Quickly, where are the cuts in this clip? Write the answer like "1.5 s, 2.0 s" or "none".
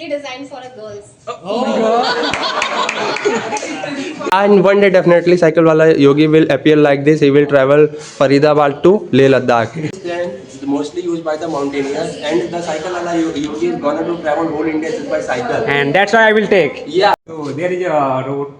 4.3 s, 9.9 s, 17.2 s